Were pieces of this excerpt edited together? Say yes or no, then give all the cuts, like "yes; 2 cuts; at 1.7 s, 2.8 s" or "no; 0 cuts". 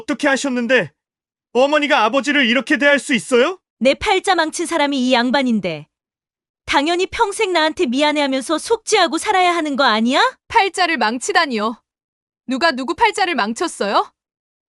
yes; 2 cuts; at 3.6 s, 10.4 s